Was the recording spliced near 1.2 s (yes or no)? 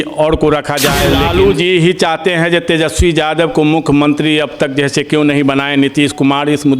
yes